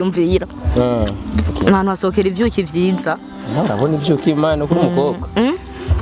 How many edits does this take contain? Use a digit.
1